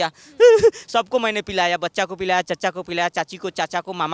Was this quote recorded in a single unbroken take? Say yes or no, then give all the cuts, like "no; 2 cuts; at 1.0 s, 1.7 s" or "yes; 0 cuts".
yes; 0 cuts